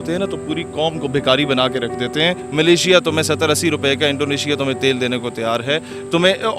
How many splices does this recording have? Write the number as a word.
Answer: one